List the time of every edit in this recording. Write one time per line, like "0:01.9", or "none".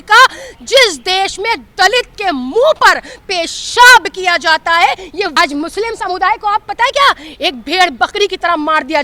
0:05.3